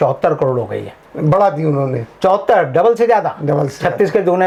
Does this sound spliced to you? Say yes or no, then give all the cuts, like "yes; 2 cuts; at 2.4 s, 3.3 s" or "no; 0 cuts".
no; 0 cuts